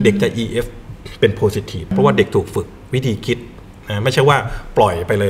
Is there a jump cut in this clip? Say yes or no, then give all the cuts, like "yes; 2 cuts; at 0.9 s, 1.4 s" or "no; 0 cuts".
yes; 1 cut; at 1.9 s